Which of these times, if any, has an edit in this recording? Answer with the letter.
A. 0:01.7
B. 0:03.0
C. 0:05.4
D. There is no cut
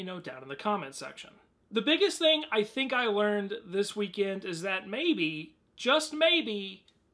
C